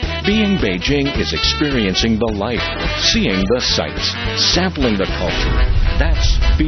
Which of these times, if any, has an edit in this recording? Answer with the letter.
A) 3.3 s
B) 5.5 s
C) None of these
A